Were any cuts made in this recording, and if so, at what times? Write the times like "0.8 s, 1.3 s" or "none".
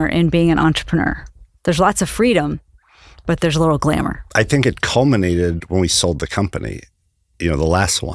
4.2 s